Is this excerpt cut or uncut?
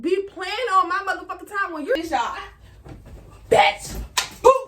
cut